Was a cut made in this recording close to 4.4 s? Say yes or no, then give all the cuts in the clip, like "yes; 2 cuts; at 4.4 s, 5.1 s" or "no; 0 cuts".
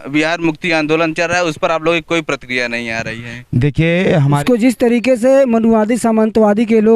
yes; 1 cut; at 4.4 s